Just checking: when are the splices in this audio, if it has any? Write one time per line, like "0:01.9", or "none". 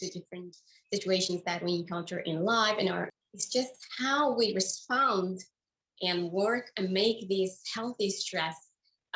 0:03.1